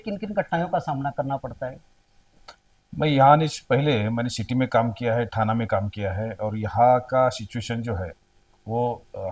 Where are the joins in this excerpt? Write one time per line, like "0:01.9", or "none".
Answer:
none